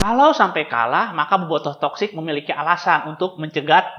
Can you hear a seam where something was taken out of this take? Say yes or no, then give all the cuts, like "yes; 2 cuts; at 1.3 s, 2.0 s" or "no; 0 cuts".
no; 0 cuts